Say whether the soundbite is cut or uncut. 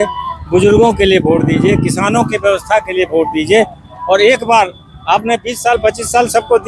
uncut